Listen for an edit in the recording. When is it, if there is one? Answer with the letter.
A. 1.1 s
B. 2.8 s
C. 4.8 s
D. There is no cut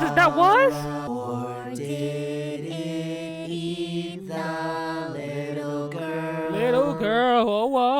A